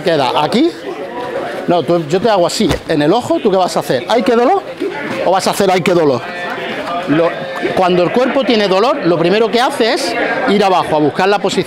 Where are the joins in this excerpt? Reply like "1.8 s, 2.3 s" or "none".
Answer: none